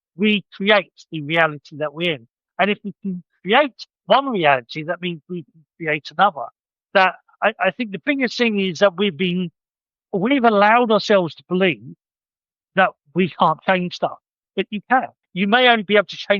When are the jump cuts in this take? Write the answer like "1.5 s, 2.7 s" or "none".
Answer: 15.2 s